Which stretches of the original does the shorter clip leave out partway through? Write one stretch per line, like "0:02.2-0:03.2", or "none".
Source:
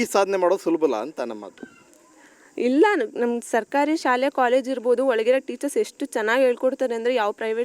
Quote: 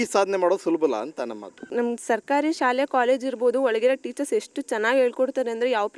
0:01.7-0:03.1